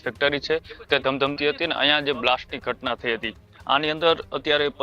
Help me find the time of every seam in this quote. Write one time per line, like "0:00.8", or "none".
none